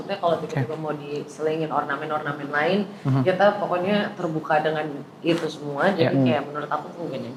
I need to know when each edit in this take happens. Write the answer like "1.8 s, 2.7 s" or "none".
none